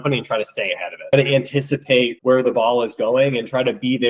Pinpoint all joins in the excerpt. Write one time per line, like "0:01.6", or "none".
0:01.1

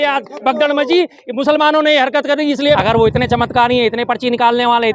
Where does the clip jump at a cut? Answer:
0:02.8

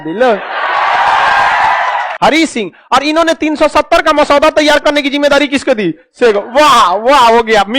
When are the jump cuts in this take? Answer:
0:02.1

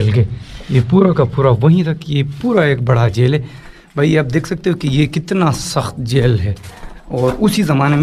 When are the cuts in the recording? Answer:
none

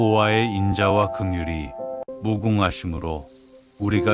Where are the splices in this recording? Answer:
none

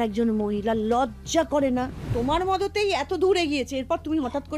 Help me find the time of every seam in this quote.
0:02.0

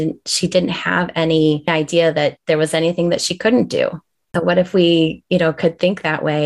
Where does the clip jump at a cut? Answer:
0:01.7
0:04.3

